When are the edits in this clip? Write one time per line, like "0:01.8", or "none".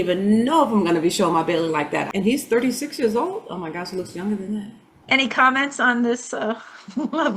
0:02.1
0:04.9